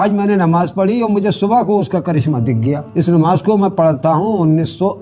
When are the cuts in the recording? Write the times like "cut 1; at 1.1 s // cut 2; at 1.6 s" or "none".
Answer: cut 1; at 2.8 s